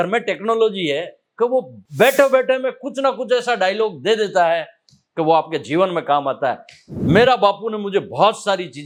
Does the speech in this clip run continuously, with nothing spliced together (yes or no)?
yes